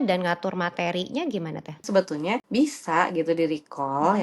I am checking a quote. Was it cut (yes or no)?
yes